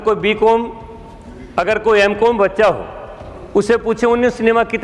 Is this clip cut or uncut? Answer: uncut